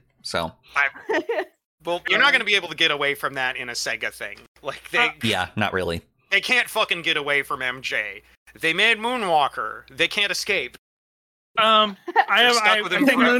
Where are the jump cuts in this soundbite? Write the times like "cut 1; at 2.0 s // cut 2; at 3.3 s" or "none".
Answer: cut 1; at 2.0 s // cut 2; at 6.3 s